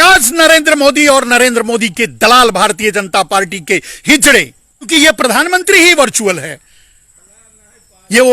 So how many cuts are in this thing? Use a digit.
1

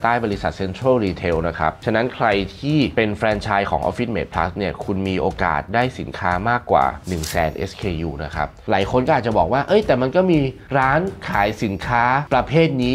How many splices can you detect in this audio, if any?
1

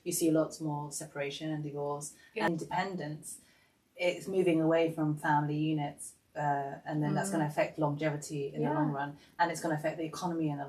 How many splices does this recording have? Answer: 1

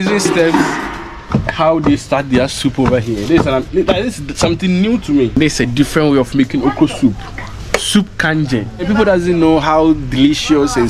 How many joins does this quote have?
2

